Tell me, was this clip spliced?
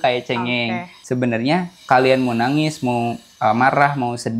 yes; 1 cut; at 0.9 s

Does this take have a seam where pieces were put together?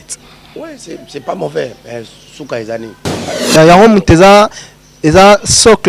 yes; 1 cut; at 3.4 s

